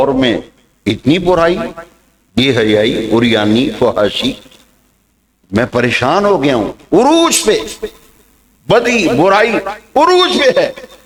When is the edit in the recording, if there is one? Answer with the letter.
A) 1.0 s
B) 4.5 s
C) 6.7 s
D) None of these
D